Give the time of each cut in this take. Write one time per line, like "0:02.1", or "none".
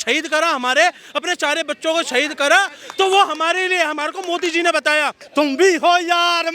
0:05.2